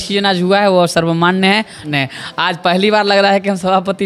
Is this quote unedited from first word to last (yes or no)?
no